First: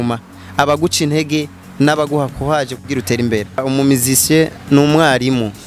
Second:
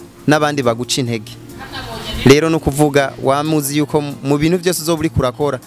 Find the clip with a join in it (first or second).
first